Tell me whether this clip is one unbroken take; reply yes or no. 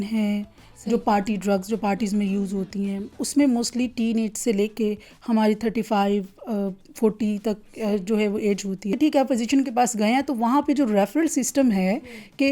no